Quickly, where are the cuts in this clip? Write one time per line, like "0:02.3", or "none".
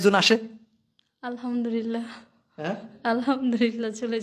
none

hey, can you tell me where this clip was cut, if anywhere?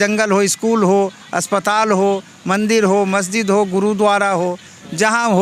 none

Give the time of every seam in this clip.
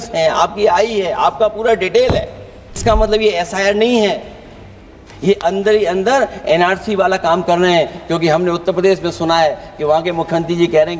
0:02.8

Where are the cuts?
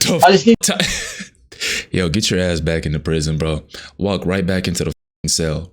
none

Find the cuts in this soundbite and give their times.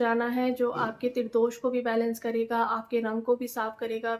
none

